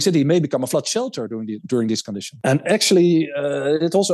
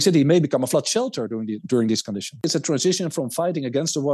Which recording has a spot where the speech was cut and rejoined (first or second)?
second